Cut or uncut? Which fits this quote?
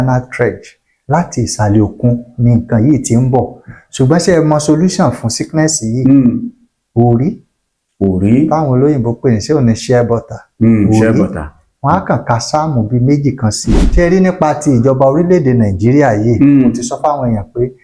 cut